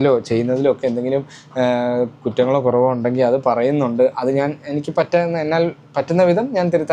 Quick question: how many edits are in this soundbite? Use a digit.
0